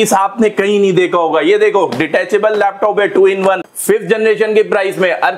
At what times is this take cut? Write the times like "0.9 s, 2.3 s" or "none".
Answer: 3.6 s

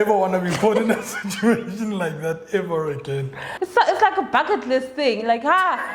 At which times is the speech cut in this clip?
3.4 s

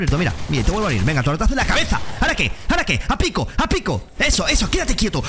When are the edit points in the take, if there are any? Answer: none

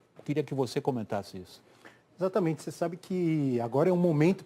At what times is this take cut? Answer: 1.4 s

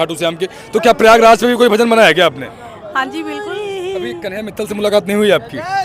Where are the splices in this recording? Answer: 3.4 s, 4.4 s

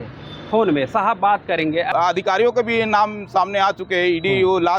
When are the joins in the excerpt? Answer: 1.9 s

